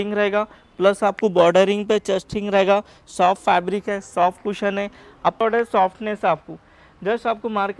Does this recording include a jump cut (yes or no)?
yes